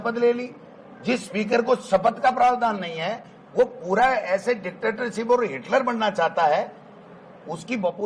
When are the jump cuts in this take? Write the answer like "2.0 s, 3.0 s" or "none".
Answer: none